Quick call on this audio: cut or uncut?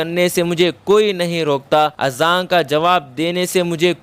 cut